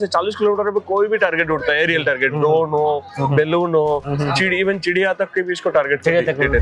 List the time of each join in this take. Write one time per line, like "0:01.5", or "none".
none